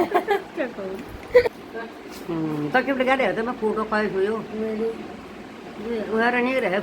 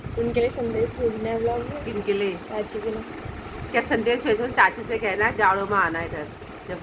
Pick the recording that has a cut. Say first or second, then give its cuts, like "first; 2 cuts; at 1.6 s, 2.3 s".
first; 1 cut; at 1.7 s